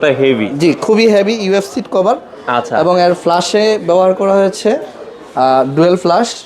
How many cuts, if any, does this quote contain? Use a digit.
0